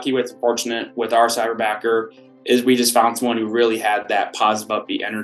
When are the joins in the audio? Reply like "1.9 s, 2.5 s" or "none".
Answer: none